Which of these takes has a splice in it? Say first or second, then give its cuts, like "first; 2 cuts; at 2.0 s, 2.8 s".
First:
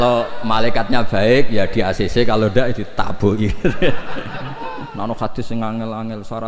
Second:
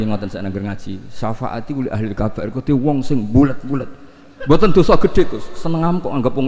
first; 1 cut; at 4.9 s